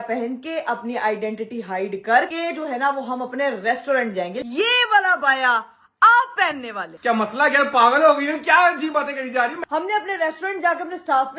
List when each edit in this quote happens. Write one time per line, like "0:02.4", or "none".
0:02.3
0:04.4
0:07.0
0:09.6